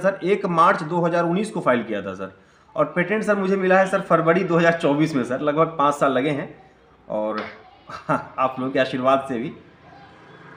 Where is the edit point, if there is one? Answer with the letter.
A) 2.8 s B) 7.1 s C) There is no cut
C